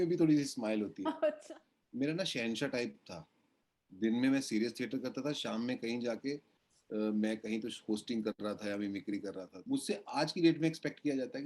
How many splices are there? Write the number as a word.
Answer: two